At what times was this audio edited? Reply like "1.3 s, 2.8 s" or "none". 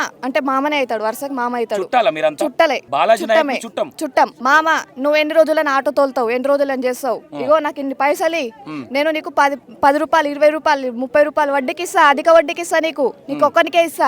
2.8 s, 4.4 s